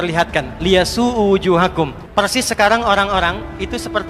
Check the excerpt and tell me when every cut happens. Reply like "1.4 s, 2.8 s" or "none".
2.0 s